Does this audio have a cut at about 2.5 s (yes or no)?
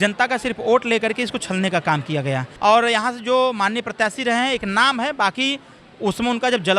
yes